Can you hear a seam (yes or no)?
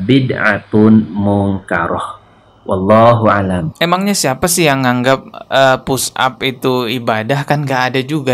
yes